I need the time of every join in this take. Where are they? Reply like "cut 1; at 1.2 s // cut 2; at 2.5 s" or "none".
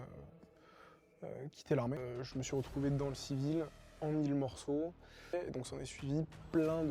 cut 1; at 2.0 s // cut 2; at 5.3 s